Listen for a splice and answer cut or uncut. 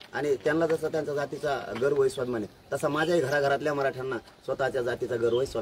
uncut